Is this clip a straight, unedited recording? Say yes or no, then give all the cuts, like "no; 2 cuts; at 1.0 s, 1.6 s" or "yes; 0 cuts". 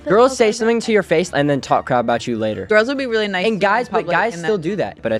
yes; 0 cuts